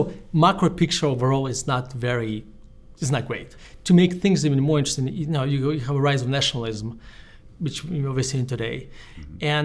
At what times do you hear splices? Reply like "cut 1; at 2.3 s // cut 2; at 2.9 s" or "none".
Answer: none